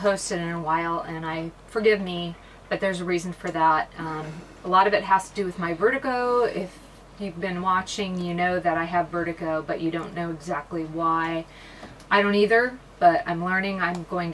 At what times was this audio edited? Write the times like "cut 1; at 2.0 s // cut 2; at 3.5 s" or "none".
none